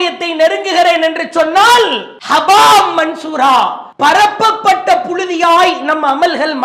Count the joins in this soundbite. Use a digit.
1